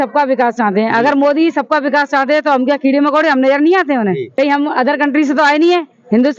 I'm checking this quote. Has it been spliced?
yes; 1 cut; at 4.3 s

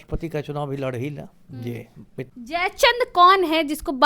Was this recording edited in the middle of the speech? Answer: yes; 1 cut; at 2.3 s

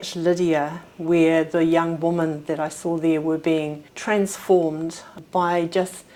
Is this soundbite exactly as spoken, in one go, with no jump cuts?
yes; 0 cuts

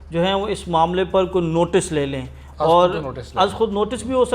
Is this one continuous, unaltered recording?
yes; 0 cuts

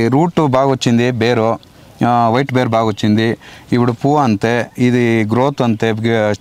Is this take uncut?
yes; 0 cuts

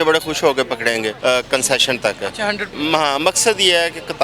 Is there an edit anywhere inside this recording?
yes; 2 cuts; at 1.1 s, 2.7 s

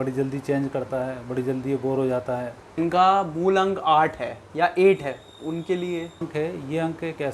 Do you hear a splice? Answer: yes; 2 cuts; at 2.8 s, 6.3 s

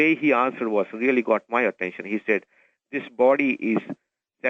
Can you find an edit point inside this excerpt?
no; 0 cuts

